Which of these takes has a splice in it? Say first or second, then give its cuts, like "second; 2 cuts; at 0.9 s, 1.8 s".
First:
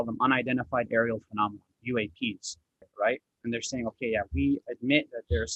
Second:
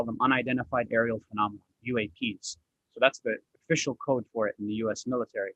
first; 1 cut; at 2.8 s